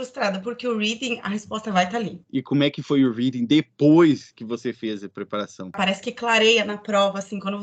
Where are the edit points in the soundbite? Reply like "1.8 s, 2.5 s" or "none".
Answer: 2.2 s, 5.8 s